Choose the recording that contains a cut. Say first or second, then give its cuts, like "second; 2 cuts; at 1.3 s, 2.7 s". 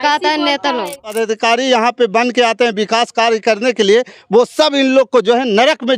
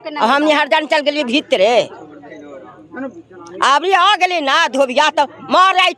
first; 1 cut; at 1.1 s